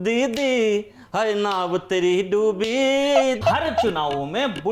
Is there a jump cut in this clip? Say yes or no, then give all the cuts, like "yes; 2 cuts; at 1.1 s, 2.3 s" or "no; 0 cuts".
yes; 1 cut; at 3.4 s